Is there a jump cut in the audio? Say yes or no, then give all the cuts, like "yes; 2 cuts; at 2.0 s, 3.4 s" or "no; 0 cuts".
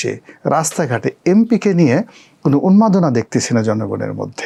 no; 0 cuts